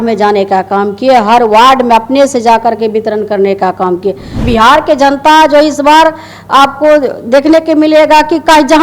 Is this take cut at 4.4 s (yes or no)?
yes